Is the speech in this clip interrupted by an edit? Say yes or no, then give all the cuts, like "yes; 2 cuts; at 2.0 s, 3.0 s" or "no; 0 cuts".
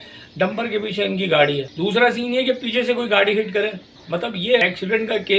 yes; 2 cuts; at 1.7 s, 4.2 s